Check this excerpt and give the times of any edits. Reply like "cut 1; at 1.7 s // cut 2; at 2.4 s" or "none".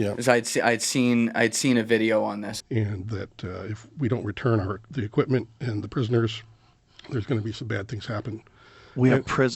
cut 1; at 2.5 s